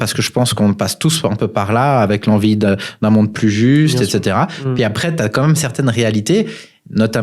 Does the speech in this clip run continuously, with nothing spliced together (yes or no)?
yes